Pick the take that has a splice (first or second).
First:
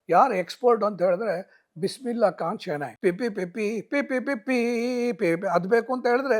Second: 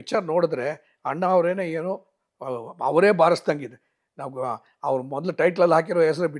first